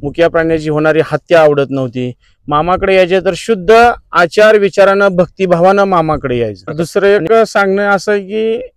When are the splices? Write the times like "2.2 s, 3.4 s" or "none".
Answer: 6.8 s